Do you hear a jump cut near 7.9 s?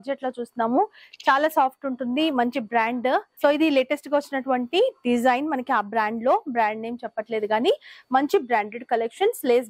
no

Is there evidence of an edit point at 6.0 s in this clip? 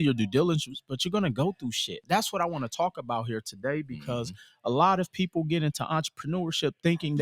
no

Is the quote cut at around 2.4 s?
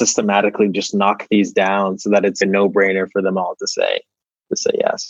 yes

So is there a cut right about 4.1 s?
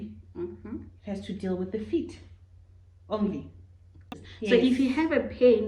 yes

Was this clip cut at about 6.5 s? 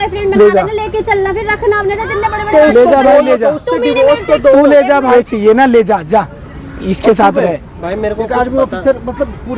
no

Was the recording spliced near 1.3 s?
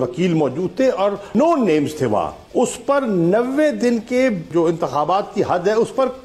yes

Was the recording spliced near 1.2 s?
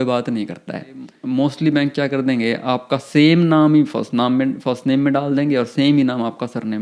yes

